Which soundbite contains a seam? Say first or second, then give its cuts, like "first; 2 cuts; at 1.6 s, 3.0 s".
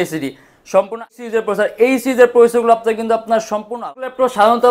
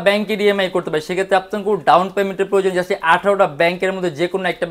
first; 2 cuts; at 1.1 s, 3.8 s